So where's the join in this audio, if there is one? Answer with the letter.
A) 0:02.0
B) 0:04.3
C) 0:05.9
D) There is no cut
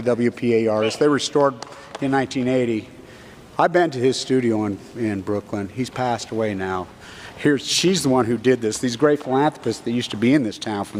B